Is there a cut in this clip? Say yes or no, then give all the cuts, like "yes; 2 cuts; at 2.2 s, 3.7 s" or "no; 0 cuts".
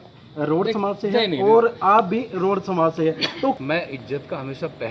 yes; 1 cut; at 3.6 s